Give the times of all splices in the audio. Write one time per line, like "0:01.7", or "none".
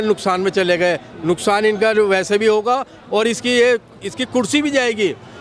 none